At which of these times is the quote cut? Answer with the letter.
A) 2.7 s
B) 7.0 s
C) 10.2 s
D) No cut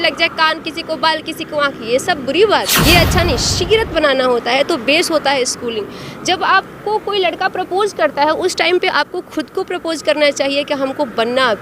A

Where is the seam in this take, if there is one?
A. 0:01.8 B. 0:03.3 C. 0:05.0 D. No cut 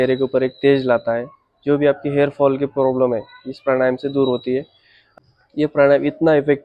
C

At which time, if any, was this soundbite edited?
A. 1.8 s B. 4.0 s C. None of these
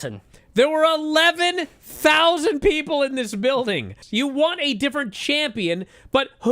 B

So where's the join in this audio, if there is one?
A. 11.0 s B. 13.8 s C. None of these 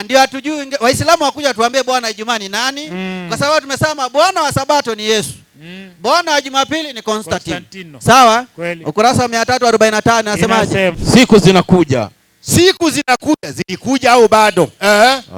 A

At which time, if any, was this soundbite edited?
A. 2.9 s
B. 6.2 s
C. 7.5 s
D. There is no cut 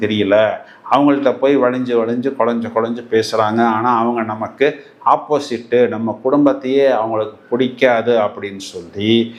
D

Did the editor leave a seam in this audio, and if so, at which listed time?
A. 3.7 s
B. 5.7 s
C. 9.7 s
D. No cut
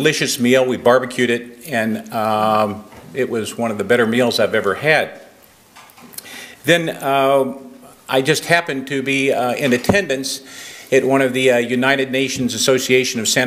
C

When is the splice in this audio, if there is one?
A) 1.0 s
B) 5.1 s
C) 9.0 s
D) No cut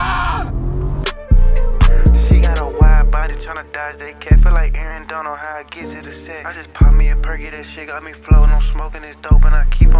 A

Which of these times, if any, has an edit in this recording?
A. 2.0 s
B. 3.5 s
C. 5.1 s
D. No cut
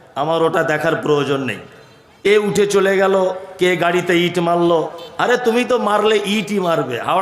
A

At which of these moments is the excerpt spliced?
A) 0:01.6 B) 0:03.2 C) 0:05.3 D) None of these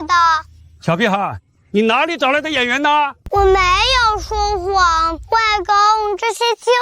B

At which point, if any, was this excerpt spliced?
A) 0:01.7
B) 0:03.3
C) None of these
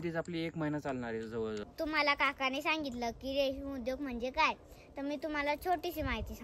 A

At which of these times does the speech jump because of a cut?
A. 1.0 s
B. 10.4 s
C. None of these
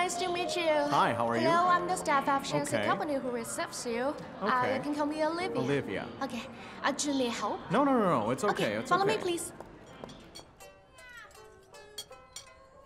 B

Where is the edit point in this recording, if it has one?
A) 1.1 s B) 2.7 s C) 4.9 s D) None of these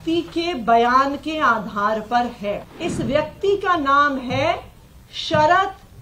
B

